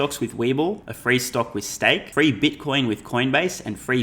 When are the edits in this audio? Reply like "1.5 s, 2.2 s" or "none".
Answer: 0.9 s, 2.1 s